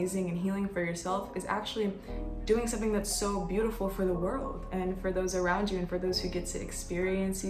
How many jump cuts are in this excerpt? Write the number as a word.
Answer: zero